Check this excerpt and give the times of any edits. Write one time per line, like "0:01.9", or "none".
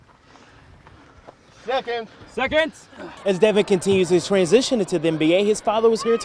0:03.2